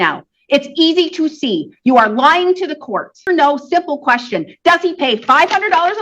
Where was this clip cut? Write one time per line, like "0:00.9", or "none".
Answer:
0:03.2